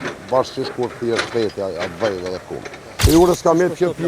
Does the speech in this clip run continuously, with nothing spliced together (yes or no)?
no